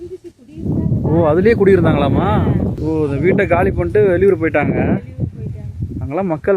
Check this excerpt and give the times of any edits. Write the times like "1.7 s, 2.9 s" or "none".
2.8 s